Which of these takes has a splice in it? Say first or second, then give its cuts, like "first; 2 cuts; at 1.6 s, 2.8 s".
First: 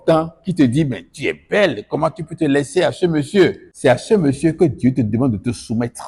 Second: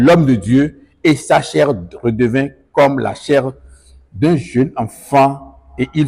first; 1 cut; at 3.7 s